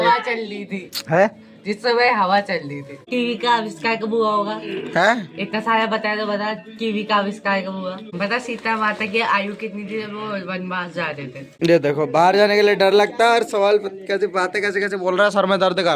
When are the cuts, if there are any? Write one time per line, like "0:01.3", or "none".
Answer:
0:03.1
0:08.1
0:11.5